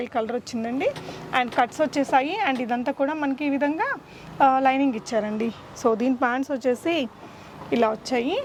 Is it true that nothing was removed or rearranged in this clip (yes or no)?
yes